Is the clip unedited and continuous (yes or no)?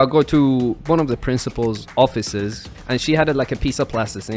no